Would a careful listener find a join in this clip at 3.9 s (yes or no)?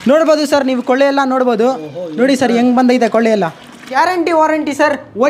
yes